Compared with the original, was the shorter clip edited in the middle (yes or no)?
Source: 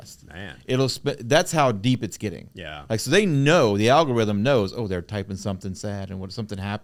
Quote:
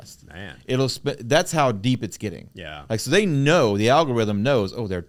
no